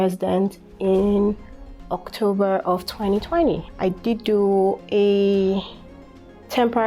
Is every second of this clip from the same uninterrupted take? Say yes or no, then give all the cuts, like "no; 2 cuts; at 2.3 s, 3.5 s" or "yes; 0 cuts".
no; 2 cuts; at 3.7 s, 4.8 s